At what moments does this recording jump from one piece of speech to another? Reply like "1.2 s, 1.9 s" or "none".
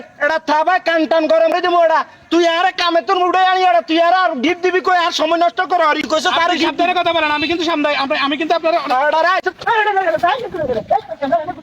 1.5 s, 6.1 s